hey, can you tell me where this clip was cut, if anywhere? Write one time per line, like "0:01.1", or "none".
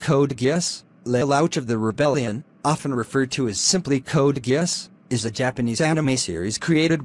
0:01.9